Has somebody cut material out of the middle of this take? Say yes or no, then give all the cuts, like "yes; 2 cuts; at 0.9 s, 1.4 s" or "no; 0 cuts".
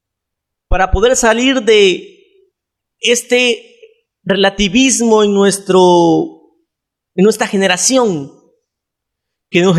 no; 0 cuts